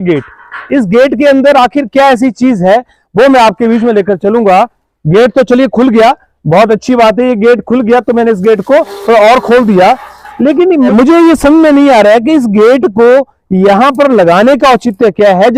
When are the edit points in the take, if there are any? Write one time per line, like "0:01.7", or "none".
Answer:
none